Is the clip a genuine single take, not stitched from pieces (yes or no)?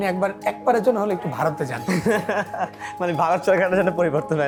yes